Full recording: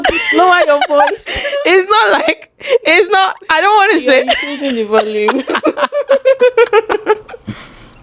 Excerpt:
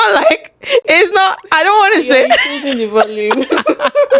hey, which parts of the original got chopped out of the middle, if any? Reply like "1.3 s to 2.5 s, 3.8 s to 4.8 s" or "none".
none